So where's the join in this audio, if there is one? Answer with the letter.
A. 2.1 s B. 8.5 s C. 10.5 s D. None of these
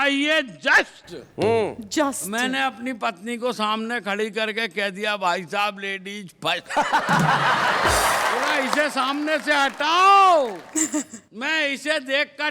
B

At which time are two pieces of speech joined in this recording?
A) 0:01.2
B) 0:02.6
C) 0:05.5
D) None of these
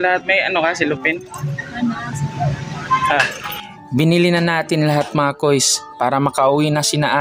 D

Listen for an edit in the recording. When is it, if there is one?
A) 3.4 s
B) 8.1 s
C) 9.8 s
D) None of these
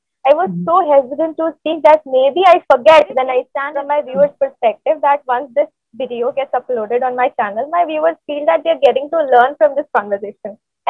A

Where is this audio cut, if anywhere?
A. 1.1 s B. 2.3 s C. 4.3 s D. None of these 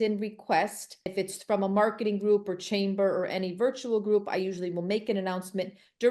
A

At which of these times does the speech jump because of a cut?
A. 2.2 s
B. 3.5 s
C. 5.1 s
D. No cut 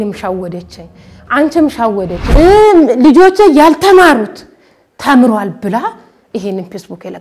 A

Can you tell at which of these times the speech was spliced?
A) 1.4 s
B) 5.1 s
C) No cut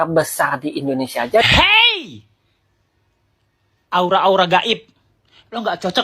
A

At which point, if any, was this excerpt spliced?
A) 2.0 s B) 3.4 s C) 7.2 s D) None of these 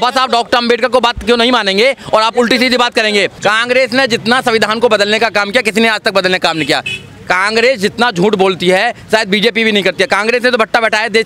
B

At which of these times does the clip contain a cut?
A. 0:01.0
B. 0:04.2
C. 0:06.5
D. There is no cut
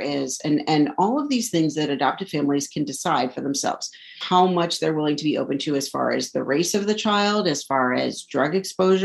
B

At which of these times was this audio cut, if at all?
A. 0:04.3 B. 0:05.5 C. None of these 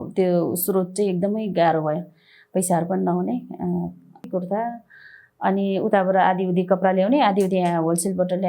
A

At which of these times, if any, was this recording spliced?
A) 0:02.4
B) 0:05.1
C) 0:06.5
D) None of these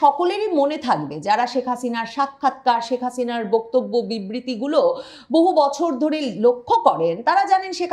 D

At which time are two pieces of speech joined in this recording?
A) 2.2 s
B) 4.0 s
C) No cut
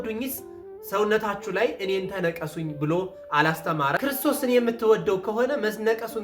B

